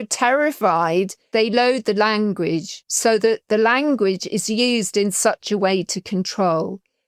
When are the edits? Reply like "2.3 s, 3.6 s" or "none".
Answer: 1.2 s